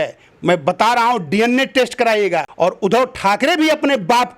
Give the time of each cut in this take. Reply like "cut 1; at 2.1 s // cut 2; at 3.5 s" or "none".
cut 1; at 2.5 s